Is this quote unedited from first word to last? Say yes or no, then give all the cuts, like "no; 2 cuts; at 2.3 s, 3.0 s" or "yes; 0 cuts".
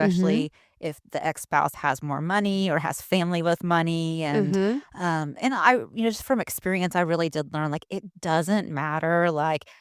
yes; 0 cuts